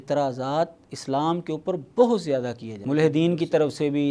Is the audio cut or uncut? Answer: cut